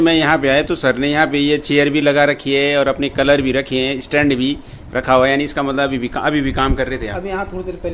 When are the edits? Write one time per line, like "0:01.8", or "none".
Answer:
none